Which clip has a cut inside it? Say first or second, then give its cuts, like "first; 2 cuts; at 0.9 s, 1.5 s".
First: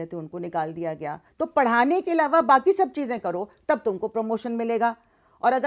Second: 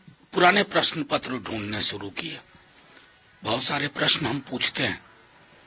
first; 1 cut; at 1.2 s